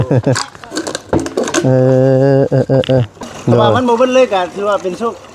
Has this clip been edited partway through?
yes; 1 cut; at 3.2 s

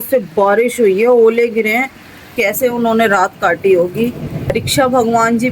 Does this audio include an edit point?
yes; 2 cuts; at 2.3 s, 4.5 s

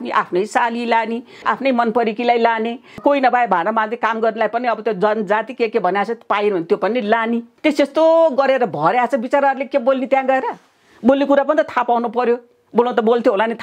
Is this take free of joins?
no; 3 cuts; at 1.4 s, 3.0 s, 7.5 s

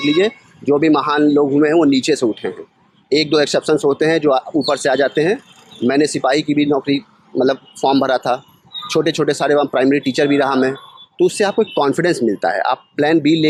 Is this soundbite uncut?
yes; 0 cuts

